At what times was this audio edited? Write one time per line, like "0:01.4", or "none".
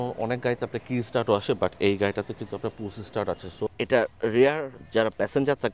0:03.7